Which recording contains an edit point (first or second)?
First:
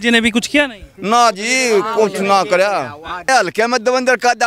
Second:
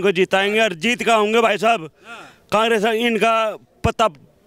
first